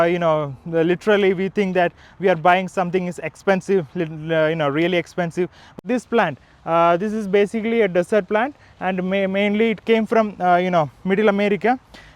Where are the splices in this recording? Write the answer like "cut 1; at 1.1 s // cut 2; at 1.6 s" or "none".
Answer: cut 1; at 5.8 s